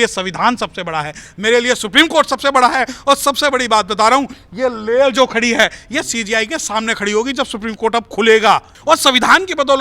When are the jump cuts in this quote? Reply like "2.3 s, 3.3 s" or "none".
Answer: 1.3 s, 8.7 s